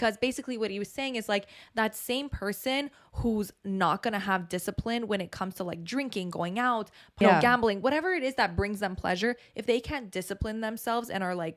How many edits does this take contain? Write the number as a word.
one